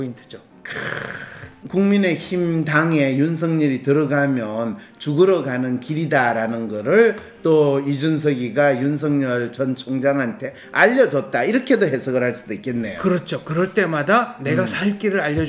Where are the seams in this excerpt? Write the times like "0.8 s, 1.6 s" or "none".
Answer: 1.6 s